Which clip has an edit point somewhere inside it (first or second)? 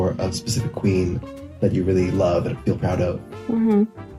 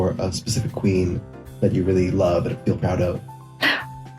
second